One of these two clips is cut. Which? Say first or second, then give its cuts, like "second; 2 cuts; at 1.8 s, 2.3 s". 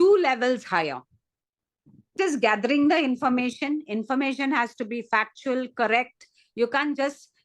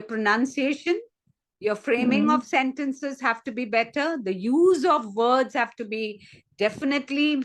first; 1 cut; at 2.1 s